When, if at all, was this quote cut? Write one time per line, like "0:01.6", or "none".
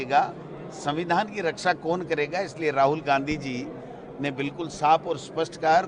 none